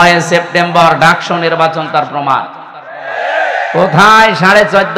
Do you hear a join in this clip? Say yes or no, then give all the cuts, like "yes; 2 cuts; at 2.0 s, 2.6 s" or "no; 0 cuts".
no; 0 cuts